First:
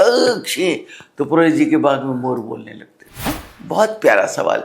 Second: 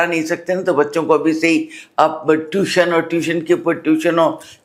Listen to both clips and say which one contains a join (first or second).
first